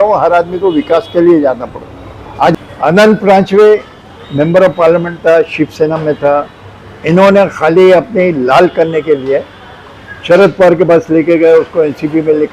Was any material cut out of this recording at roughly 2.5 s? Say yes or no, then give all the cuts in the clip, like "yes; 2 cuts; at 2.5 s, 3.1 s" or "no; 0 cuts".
yes; 1 cut; at 2.5 s